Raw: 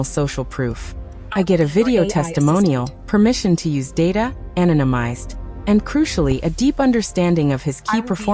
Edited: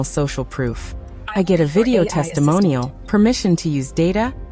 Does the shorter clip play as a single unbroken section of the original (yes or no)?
yes